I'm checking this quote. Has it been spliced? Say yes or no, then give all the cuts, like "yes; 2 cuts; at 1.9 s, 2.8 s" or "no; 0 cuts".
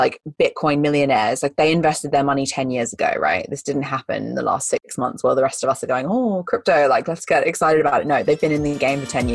no; 0 cuts